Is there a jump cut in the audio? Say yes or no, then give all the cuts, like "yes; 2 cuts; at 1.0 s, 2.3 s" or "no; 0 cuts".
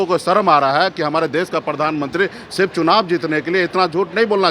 no; 0 cuts